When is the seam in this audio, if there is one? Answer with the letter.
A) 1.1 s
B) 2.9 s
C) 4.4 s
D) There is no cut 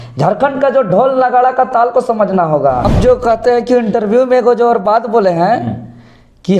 B